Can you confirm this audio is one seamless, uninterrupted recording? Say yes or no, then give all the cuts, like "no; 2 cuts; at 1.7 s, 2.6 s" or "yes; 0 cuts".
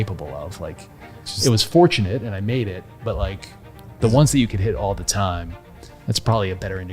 yes; 0 cuts